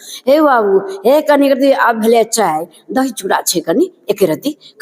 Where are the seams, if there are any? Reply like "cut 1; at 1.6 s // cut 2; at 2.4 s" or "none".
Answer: none